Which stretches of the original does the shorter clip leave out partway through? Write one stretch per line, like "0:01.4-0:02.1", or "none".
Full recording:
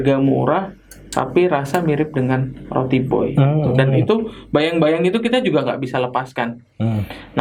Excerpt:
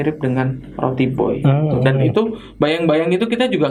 none